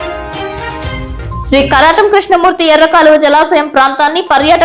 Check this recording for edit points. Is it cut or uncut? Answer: cut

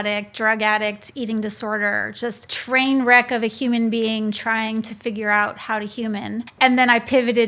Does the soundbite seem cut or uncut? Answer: cut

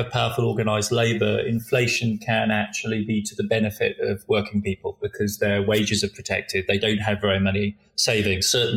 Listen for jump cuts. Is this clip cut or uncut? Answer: uncut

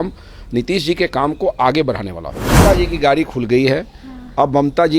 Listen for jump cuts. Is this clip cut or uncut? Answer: cut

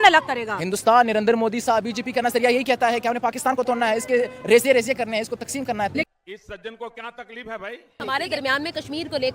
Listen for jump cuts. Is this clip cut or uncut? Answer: cut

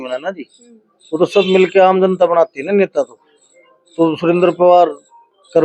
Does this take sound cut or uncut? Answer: uncut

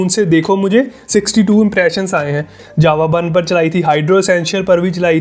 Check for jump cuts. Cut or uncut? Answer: cut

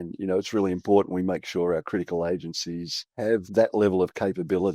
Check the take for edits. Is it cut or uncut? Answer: cut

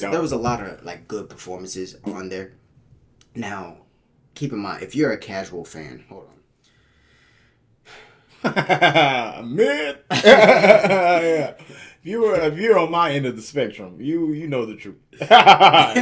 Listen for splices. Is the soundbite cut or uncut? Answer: uncut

